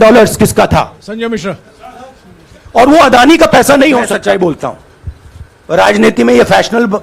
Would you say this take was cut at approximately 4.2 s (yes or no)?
yes